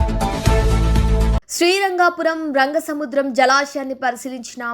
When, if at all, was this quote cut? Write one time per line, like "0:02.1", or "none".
0:01.5